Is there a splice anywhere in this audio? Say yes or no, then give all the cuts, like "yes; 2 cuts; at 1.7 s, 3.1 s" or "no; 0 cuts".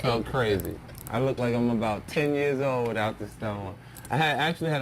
yes; 1 cut; at 3.3 s